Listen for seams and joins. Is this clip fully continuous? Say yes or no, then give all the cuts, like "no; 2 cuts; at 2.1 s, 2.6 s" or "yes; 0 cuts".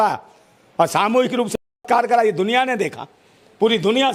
yes; 0 cuts